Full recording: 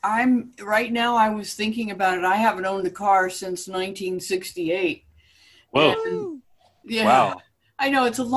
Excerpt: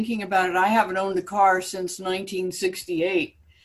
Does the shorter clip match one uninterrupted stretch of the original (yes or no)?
yes